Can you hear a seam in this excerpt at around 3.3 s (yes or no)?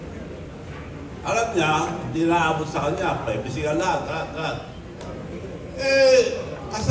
no